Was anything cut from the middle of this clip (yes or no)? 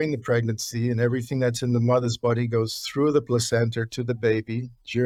no